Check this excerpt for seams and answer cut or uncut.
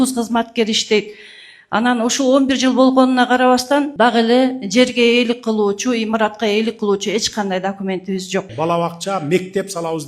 cut